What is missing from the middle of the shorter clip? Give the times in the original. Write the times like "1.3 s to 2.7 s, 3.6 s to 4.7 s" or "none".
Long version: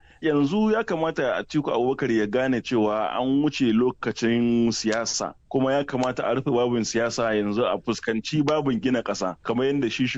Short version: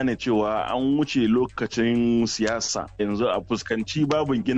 5.4 s to 7.4 s